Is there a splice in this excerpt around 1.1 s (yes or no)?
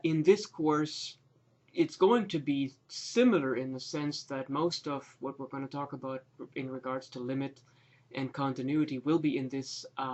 no